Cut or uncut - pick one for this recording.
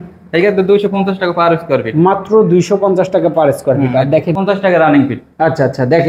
cut